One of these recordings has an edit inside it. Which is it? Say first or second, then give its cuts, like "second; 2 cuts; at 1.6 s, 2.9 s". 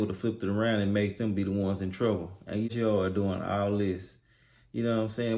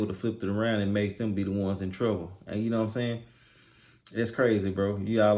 first; 1 cut; at 2.7 s